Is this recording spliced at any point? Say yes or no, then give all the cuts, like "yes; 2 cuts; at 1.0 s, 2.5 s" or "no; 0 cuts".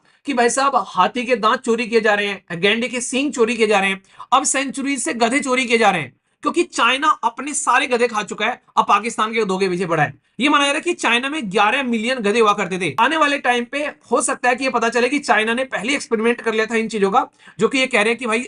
yes; 2 cuts; at 6.3 s, 13.0 s